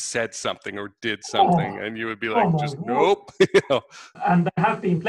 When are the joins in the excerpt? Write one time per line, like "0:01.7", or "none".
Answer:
0:04.2